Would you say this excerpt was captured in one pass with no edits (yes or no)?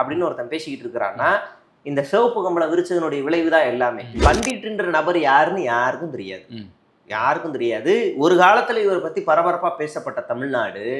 no